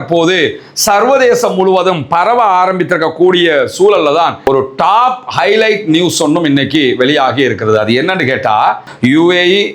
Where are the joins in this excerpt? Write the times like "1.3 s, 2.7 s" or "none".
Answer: 4.4 s, 8.8 s